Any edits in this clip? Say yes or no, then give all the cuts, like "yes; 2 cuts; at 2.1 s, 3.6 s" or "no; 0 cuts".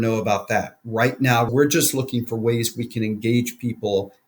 yes; 1 cut; at 1.5 s